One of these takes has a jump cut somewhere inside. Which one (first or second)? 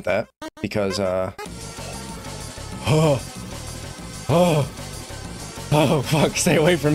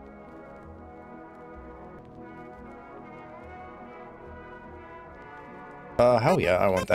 second